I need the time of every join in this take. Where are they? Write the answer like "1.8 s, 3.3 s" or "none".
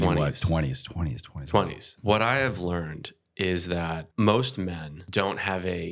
1.9 s, 4.1 s, 4.9 s